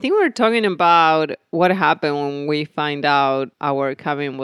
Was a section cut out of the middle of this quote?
yes; 1 cut; at 3.5 s

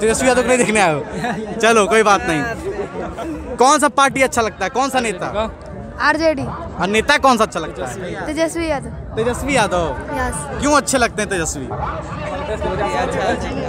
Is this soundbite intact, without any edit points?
yes; 0 cuts

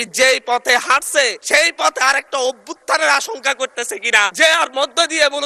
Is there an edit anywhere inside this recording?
yes; 2 cuts; at 1.4 s, 4.3 s

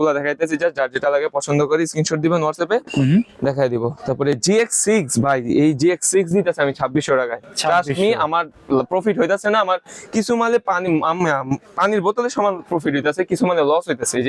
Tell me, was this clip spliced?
no; 0 cuts

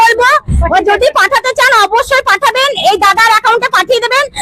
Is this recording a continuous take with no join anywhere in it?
yes; 0 cuts

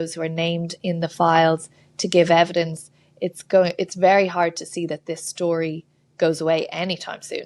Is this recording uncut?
yes; 0 cuts

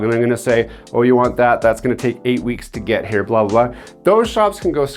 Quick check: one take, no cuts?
yes; 0 cuts

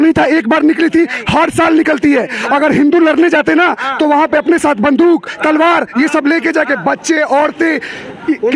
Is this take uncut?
yes; 0 cuts

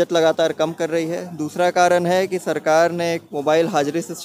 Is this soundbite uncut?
yes; 0 cuts

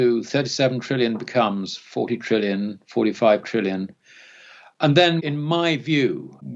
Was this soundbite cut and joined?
no; 0 cuts

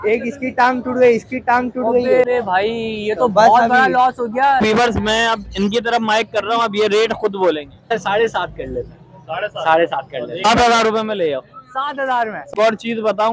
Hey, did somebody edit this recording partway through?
yes; 5 cuts; at 2.2 s, 4.6 s, 7.9 s, 10.4 s, 12.4 s

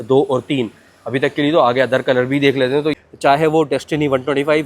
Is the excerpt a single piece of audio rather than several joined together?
no; 1 cut; at 3.0 s

